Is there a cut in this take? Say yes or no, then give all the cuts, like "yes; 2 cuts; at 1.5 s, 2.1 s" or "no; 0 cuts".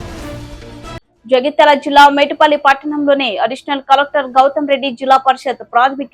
yes; 1 cut; at 1.0 s